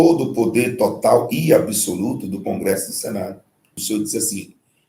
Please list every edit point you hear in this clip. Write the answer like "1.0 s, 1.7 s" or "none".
3.8 s